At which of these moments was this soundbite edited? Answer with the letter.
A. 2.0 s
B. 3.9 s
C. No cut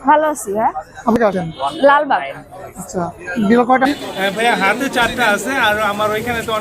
B